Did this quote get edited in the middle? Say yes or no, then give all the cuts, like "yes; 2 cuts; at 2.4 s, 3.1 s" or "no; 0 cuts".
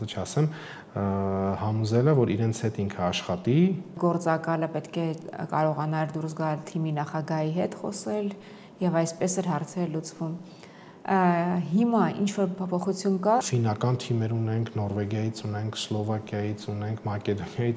yes; 2 cuts; at 4.0 s, 13.4 s